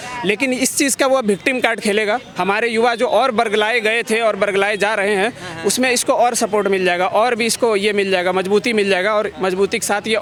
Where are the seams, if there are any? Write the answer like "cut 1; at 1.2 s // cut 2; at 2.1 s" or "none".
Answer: none

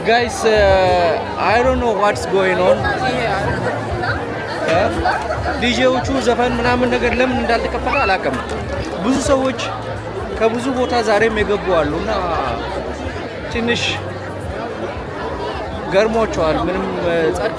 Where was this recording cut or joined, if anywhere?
none

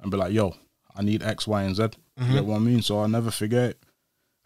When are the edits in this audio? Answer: none

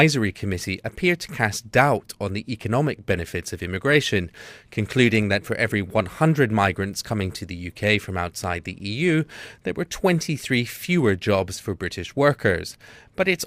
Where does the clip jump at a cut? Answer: cut 1; at 4.1 s

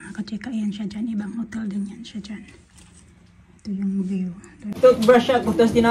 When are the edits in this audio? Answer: cut 1; at 4.7 s

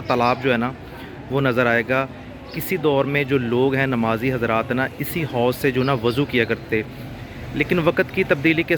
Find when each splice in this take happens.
none

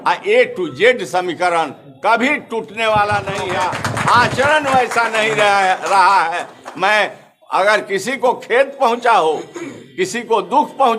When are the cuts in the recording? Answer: cut 1; at 3.5 s

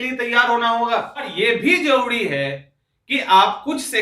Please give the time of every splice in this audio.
cut 1; at 1.3 s

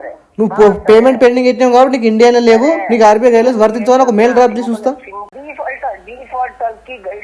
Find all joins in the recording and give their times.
cut 1; at 5.3 s

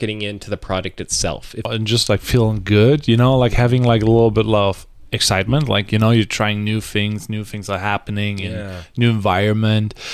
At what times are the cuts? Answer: cut 1; at 1.7 s

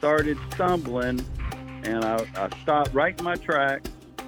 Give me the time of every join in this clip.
none

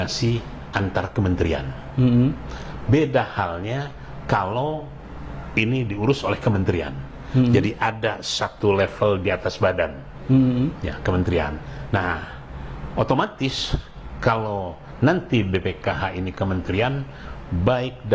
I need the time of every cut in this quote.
none

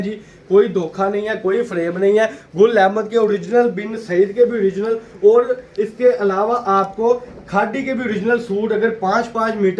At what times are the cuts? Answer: none

